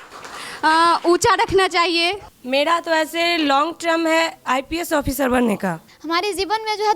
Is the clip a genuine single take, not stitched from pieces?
no; 2 cuts; at 2.3 s, 5.9 s

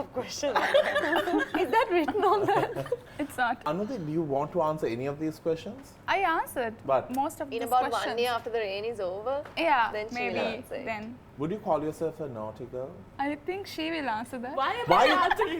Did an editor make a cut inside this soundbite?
yes; 3 cuts; at 3.6 s, 11.2 s, 13.0 s

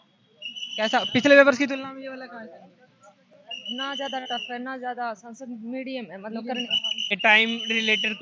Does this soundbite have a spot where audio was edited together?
yes; 1 cut; at 7.2 s

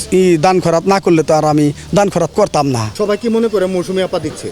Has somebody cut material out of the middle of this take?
yes; 1 cut; at 2.9 s

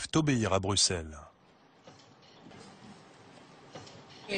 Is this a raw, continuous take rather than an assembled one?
no; 1 cut; at 2.5 s

